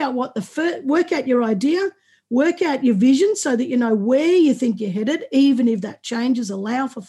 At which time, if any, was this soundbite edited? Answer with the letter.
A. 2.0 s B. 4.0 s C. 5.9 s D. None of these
D